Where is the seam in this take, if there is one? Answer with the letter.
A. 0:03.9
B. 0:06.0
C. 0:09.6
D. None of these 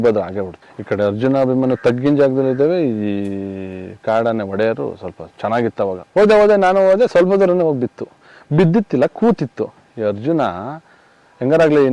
B